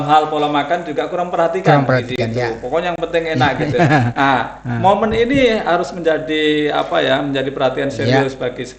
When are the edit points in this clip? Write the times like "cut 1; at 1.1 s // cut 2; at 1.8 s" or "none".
none